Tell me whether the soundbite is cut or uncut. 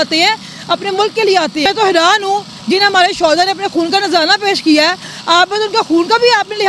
cut